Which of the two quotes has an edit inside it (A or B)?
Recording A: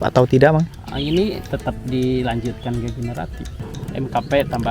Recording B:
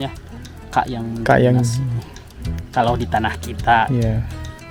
A